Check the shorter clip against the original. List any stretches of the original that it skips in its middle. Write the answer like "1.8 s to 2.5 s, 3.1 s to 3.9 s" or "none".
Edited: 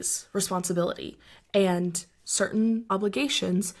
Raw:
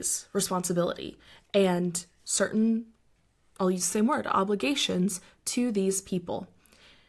2.9 s to 4.4 s